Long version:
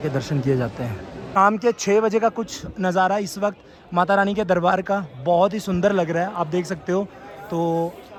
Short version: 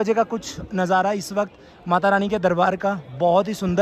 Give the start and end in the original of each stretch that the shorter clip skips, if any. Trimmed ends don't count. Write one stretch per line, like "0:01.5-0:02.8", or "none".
none